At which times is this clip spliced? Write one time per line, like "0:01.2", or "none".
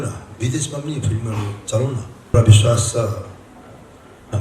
0:02.3